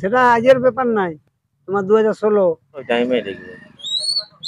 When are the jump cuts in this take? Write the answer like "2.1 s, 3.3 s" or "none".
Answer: 2.9 s